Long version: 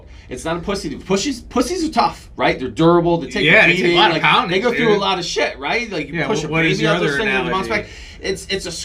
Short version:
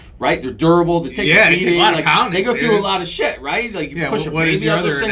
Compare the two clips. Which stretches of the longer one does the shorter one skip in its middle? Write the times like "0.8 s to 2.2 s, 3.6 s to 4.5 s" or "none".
none